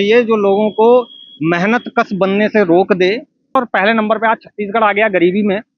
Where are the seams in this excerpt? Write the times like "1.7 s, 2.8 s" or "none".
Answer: 3.6 s